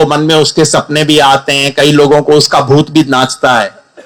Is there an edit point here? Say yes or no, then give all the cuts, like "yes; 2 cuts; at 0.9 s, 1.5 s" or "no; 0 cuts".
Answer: no; 0 cuts